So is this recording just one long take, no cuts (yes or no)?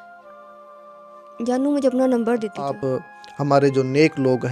no